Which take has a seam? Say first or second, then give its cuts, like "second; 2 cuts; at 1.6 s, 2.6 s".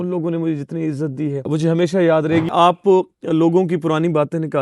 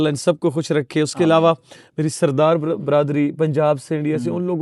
first; 2 cuts; at 1.4 s, 2.5 s